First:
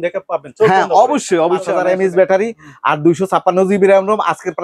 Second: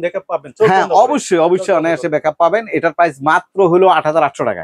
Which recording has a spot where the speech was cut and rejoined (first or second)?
first